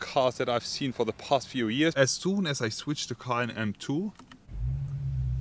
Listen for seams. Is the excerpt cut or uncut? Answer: cut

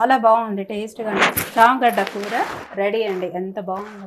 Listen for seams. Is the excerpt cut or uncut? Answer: cut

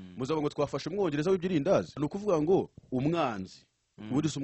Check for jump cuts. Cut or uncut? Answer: cut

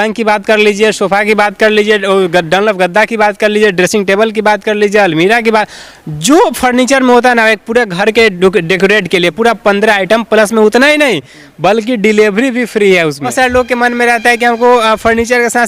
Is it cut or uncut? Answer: cut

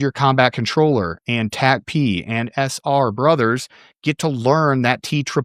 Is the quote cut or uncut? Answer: uncut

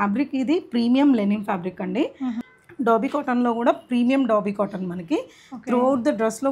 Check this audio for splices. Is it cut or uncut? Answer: cut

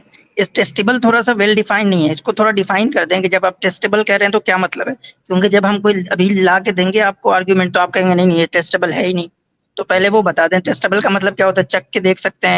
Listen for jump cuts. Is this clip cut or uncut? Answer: uncut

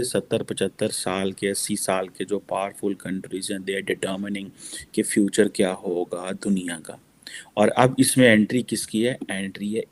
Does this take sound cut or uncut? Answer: uncut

